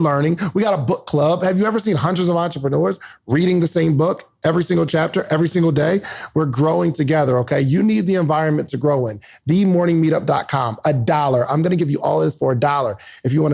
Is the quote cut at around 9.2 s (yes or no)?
no